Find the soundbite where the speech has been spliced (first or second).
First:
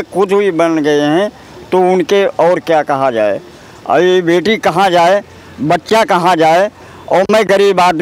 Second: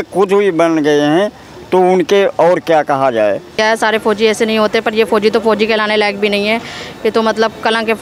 second